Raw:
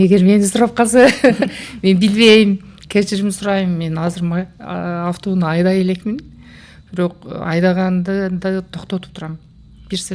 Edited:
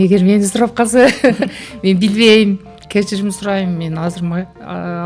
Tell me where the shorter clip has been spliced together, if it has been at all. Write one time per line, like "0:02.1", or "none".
none